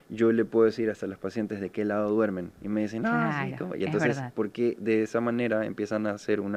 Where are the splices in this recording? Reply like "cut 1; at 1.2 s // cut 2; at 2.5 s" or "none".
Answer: none